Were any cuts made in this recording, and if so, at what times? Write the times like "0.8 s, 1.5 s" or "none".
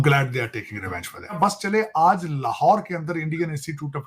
1.3 s

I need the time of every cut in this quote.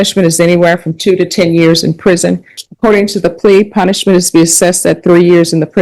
2.6 s

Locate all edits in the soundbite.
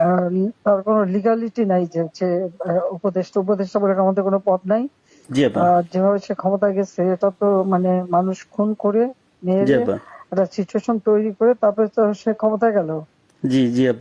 none

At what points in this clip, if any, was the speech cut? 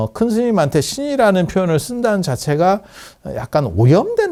none

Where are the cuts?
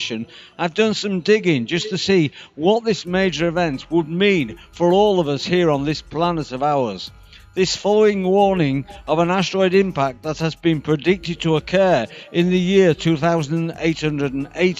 none

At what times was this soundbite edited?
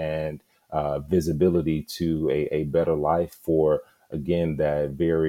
none

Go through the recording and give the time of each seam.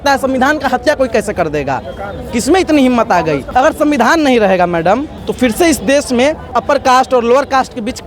3.4 s, 5.2 s, 6.6 s

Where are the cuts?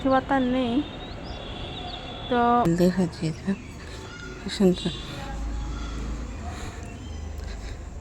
2.7 s

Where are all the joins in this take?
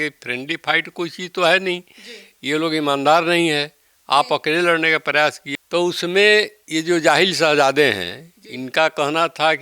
5.5 s

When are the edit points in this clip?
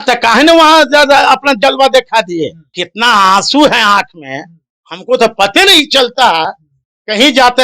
2.8 s

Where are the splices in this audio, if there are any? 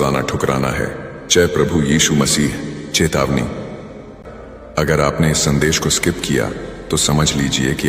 4.1 s

